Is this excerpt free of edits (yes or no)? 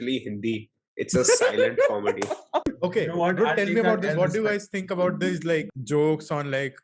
no